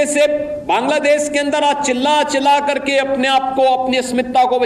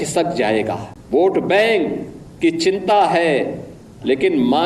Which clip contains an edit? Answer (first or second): second